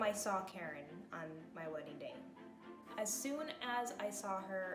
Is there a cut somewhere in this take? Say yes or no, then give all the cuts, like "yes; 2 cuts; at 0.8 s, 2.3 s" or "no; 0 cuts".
no; 0 cuts